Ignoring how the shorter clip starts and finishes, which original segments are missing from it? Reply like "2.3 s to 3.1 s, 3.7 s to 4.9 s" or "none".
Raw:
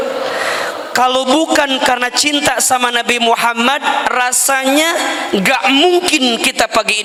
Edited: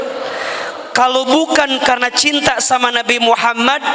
none